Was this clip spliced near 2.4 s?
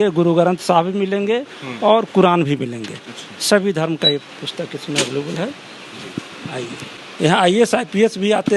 no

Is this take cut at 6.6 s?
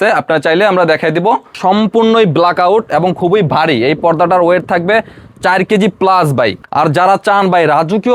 yes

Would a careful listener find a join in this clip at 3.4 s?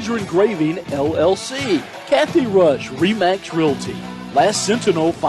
no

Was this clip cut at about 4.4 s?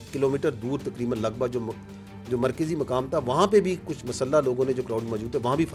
no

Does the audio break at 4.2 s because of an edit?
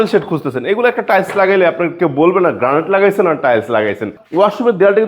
yes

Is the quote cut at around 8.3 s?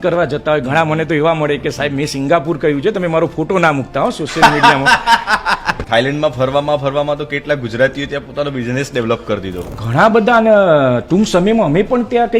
no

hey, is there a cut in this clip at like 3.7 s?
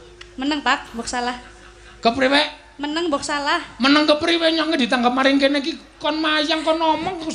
no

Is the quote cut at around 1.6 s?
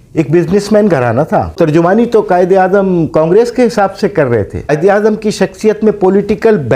yes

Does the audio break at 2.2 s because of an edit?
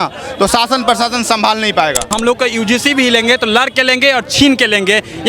yes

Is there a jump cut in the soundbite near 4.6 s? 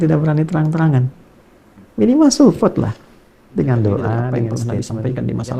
yes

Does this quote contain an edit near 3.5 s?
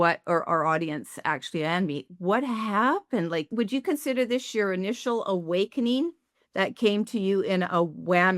yes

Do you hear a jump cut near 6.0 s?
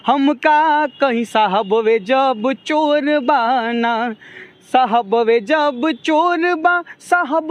no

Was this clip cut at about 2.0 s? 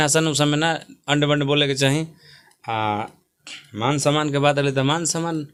no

